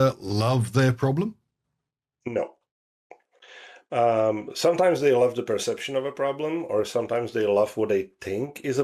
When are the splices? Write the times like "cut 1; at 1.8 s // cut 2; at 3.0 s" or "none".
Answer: none

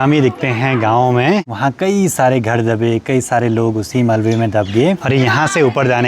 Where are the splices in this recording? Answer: cut 1; at 1.5 s // cut 2; at 5.0 s

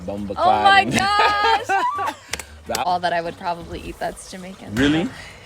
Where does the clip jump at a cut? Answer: cut 1; at 2.8 s

